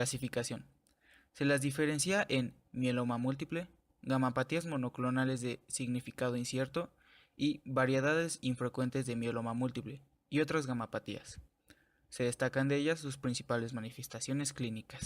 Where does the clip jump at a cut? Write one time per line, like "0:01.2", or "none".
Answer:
0:02.0